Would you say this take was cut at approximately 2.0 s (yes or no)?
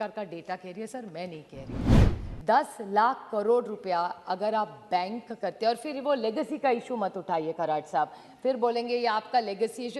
yes